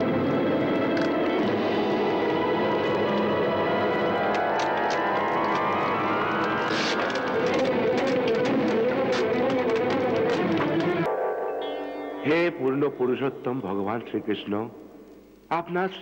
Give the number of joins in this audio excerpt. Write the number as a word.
one